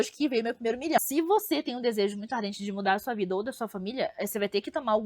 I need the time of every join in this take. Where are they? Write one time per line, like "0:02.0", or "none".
0:01.0